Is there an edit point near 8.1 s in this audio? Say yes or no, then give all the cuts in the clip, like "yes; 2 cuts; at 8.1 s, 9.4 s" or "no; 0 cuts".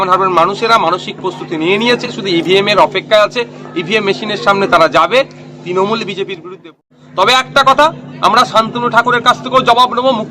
no; 1 cut; at 6.8 s